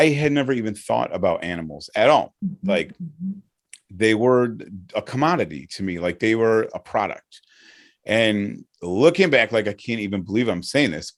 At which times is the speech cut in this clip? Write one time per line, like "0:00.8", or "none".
none